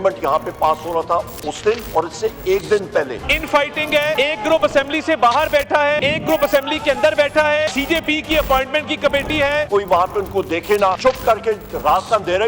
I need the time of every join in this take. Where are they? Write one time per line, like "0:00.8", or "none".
0:01.8
0:03.2
0:04.2
0:06.0
0:07.7
0:09.7
0:11.0